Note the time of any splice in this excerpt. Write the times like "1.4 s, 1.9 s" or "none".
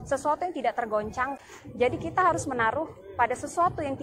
1.4 s